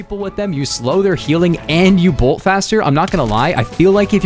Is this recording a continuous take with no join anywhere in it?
yes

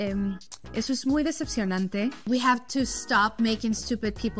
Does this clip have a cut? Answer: yes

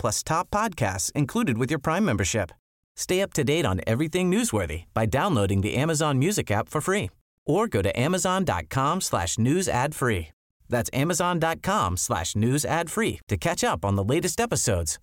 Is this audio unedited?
yes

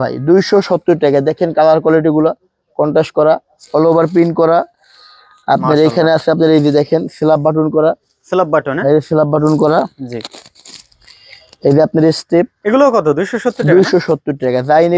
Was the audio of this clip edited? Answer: no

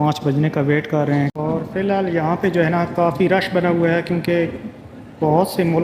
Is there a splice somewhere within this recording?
yes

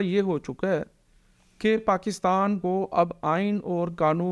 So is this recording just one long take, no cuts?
yes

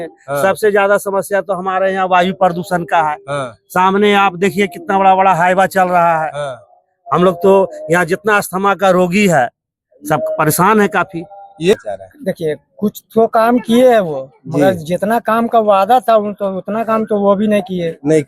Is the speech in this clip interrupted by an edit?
yes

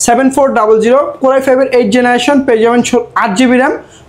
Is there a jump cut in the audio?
no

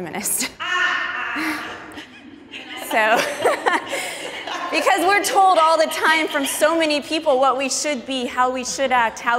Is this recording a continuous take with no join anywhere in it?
yes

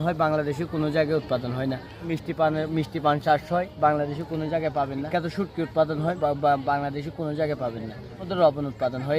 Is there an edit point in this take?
yes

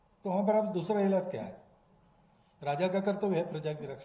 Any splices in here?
no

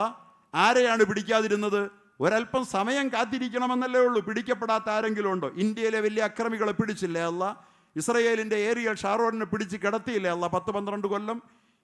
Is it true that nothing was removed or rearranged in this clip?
yes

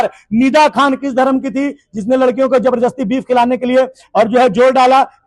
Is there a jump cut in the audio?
no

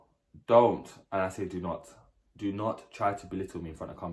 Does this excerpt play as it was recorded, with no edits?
yes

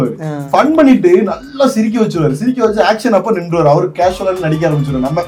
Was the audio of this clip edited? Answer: no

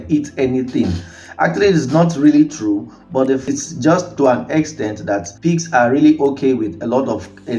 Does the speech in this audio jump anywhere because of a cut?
no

